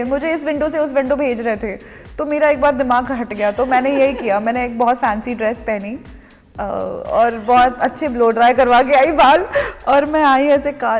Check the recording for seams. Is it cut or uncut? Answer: uncut